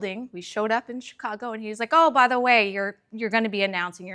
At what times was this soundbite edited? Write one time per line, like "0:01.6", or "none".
none